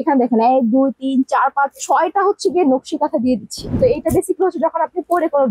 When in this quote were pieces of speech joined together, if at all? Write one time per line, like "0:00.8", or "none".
0:03.8